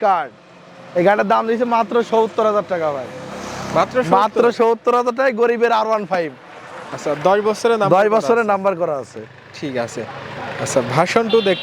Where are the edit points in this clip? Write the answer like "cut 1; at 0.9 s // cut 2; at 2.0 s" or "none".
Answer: none